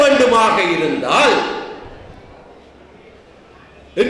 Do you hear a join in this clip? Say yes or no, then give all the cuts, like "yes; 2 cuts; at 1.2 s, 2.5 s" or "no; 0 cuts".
no; 0 cuts